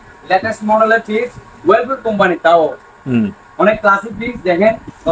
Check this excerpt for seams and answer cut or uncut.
uncut